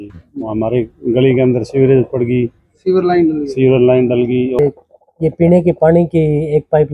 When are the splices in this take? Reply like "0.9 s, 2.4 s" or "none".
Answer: 4.6 s